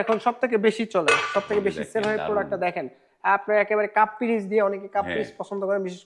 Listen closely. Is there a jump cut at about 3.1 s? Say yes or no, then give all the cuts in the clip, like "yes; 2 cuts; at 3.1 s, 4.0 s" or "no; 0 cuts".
no; 0 cuts